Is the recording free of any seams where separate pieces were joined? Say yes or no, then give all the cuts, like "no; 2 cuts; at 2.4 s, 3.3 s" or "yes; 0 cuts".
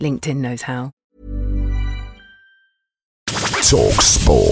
no; 2 cuts; at 0.9 s, 3.3 s